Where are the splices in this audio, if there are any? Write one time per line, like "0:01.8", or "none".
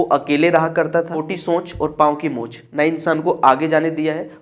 0:01.2